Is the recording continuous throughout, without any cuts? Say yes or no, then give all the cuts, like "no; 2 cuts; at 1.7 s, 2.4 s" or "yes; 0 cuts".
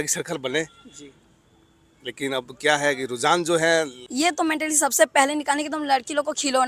no; 1 cut; at 4.0 s